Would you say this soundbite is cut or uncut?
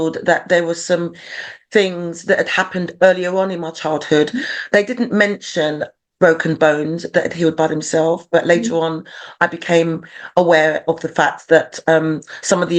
uncut